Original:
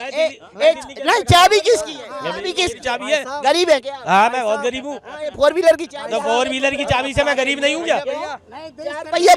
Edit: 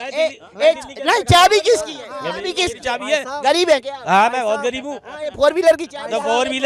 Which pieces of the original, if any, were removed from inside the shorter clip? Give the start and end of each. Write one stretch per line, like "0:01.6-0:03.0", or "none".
none